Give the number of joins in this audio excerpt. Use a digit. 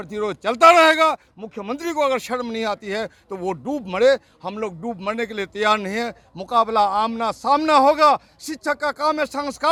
0